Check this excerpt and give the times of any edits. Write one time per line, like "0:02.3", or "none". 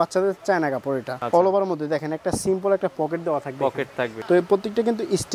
0:01.1
0:04.1